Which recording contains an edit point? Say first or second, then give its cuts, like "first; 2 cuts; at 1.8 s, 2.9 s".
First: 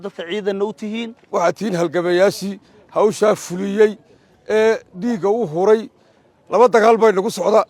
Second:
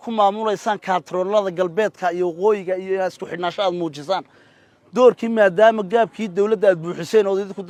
first; 1 cut; at 1.2 s